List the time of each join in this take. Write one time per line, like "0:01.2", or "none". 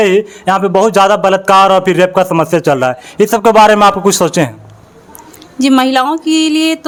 none

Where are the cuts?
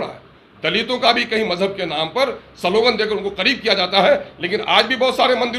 none

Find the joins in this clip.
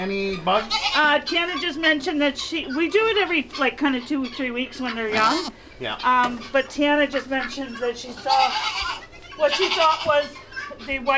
none

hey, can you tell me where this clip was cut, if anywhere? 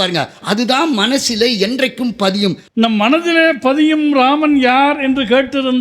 0:02.6

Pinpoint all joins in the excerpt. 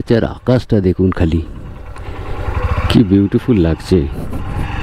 none

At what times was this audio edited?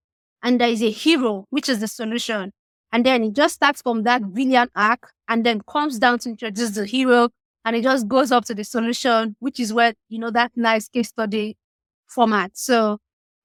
none

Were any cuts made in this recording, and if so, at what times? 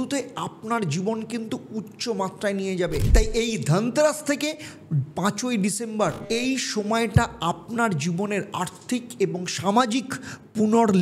none

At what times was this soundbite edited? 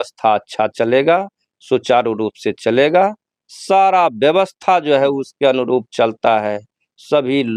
none

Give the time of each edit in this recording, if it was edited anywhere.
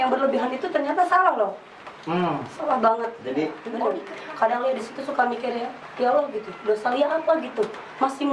0:03.7

